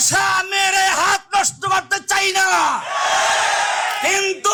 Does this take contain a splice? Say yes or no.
no